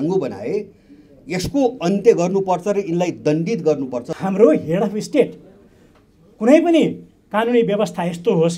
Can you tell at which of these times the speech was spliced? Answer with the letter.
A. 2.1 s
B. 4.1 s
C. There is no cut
B